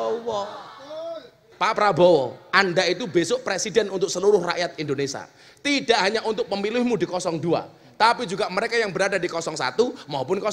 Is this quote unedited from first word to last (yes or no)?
no